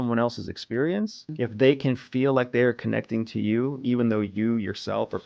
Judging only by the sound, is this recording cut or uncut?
cut